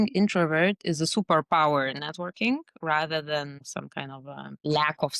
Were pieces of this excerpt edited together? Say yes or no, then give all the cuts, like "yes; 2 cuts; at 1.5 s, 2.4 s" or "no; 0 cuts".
no; 0 cuts